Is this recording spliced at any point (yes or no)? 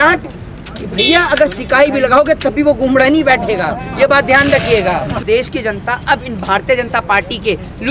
yes